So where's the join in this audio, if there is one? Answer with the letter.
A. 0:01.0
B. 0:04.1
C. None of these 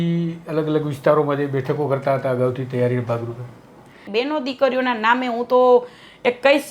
B